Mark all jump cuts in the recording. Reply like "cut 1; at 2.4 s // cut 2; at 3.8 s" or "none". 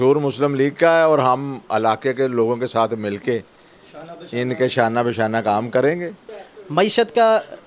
cut 1; at 6.2 s